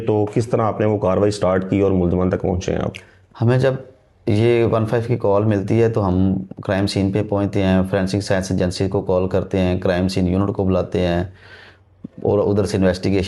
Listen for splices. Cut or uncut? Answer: uncut